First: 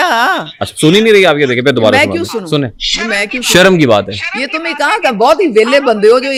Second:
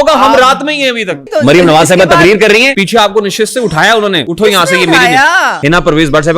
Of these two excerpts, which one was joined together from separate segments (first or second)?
second